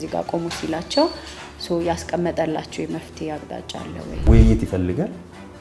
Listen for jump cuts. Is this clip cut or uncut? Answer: cut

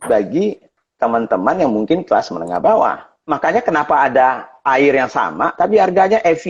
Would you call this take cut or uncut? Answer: cut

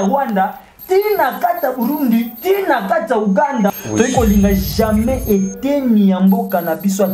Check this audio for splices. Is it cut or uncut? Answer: cut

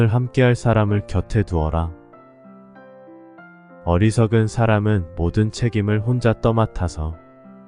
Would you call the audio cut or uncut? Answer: cut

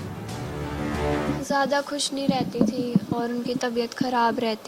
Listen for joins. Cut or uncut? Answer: cut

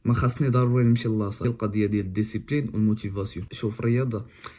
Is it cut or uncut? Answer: cut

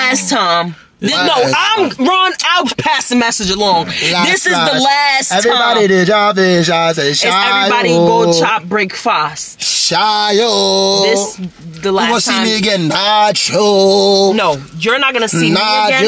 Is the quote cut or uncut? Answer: uncut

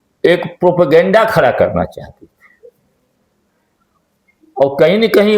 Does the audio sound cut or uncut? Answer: uncut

